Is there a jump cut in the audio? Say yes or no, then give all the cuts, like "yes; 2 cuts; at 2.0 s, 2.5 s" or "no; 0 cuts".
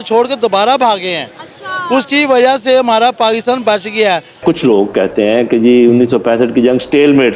yes; 1 cut; at 4.4 s